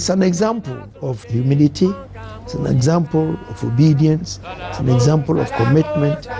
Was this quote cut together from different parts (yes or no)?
yes